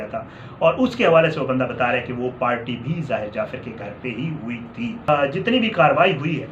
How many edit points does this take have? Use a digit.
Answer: 1